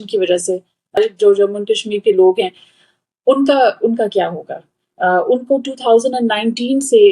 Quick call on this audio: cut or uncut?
cut